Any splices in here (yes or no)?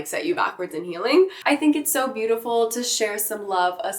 yes